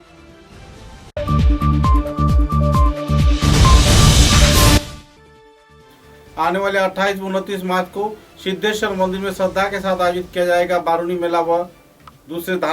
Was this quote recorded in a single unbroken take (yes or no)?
no